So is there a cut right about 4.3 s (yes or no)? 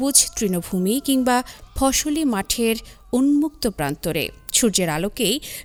no